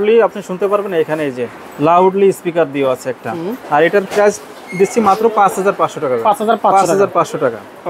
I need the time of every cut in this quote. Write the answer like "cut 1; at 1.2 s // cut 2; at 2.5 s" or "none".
none